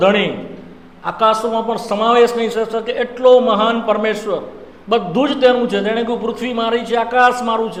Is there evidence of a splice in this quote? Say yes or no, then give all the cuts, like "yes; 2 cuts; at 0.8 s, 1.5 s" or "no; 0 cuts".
no; 0 cuts